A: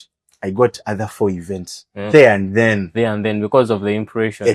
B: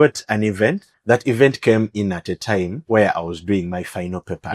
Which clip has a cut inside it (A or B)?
B